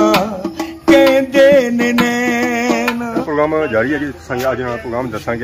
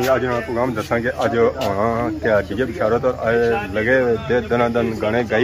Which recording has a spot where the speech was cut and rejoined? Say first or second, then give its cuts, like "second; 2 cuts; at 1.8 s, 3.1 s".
first; 1 cut; at 3.2 s